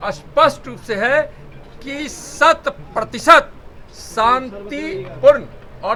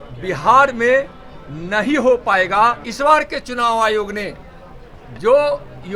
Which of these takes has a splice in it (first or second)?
second